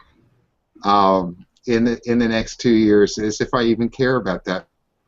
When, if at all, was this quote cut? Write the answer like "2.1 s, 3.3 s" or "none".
none